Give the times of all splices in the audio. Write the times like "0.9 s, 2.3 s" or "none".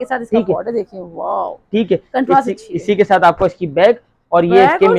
none